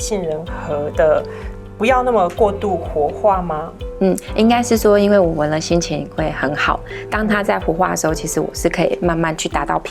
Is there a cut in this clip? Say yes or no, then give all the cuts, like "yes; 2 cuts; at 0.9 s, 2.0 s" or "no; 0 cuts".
no; 0 cuts